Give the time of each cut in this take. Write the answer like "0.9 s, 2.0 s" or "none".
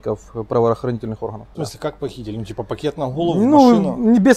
1.5 s